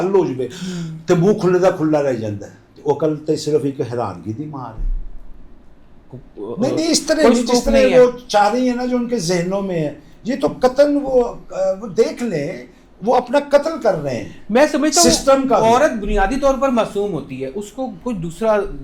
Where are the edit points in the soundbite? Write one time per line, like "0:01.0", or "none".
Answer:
0:06.1